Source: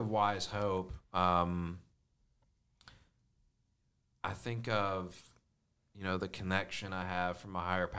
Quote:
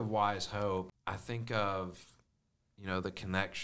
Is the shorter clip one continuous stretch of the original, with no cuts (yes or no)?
no